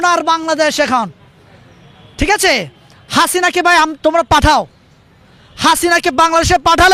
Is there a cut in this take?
no; 0 cuts

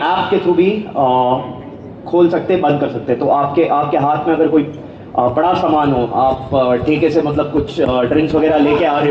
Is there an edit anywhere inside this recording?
no; 0 cuts

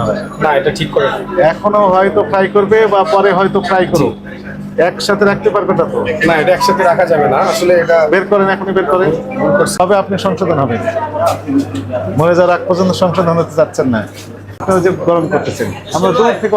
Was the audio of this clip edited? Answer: yes; 2 cuts; at 9.7 s, 14.6 s

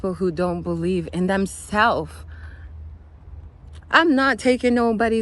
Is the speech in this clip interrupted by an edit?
yes; 1 cut; at 3.8 s

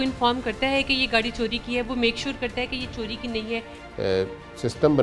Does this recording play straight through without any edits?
no; 1 cut; at 3.8 s

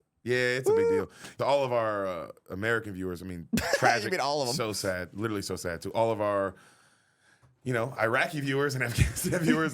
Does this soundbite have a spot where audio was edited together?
yes; 1 cut; at 1.2 s

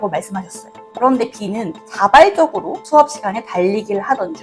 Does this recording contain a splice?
no; 0 cuts

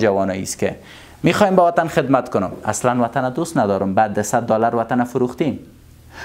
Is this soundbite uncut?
yes; 0 cuts

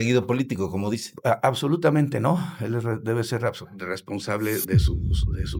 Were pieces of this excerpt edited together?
no; 0 cuts

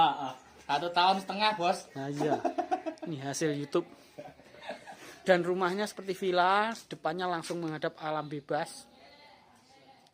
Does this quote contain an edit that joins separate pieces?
no; 0 cuts

